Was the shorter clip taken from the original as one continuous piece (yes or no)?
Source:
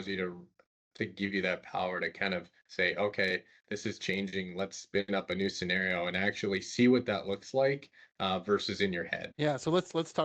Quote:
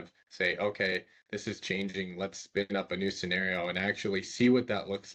yes